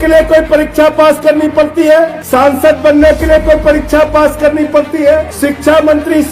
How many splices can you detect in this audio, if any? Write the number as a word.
two